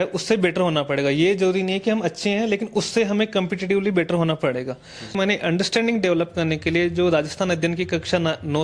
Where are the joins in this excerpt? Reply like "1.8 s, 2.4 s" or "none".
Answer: 5.2 s